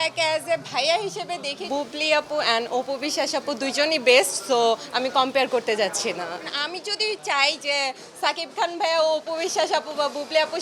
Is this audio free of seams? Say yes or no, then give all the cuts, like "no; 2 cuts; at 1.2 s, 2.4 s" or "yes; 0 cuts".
no; 2 cuts; at 1.6 s, 6.5 s